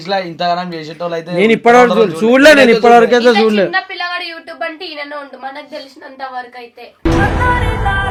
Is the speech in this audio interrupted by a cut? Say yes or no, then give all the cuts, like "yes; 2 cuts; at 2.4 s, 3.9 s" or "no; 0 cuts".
no; 0 cuts